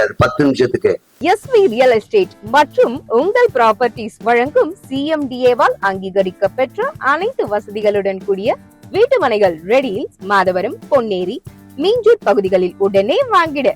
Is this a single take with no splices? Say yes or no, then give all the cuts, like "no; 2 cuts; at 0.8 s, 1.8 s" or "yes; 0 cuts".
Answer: no; 1 cut; at 1.1 s